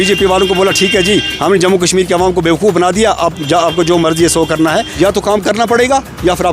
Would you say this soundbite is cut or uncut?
cut